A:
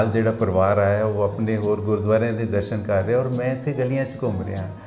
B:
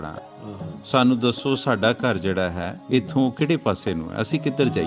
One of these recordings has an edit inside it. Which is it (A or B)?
B